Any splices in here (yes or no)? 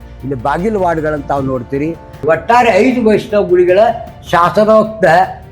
yes